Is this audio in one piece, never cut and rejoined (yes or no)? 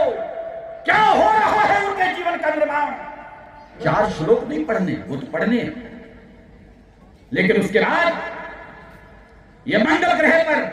no